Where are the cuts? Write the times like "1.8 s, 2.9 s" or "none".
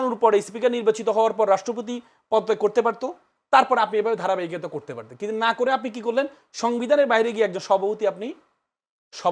none